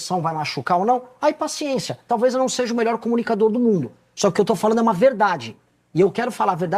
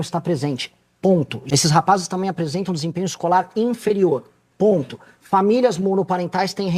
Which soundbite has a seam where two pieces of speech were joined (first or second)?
second